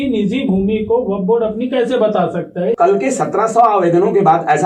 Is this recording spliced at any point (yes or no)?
yes